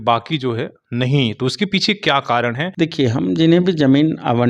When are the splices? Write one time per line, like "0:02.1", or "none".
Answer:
0:02.7

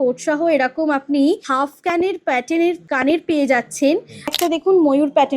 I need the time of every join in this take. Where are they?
0:01.5
0:02.8
0:04.3

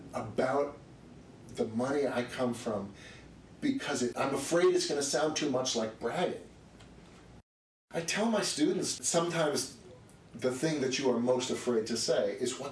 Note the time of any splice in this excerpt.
0:07.4
0:09.0

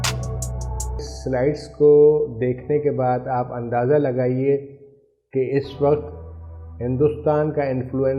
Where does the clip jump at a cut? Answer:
0:01.1

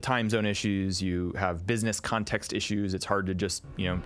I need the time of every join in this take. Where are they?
none

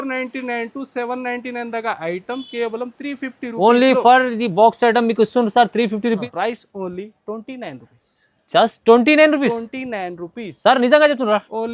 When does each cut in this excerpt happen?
0:06.2

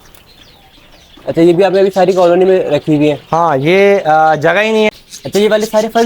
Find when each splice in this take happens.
0:05.1

